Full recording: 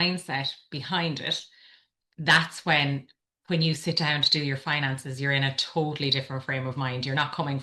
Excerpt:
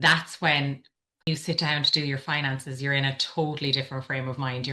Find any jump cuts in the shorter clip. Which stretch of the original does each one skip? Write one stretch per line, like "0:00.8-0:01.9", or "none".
0:03.5-0:03.6